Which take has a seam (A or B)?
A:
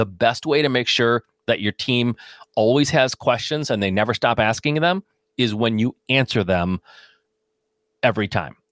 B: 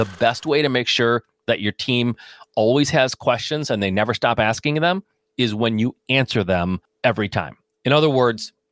B